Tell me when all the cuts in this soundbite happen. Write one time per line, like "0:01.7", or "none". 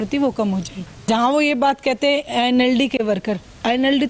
0:01.1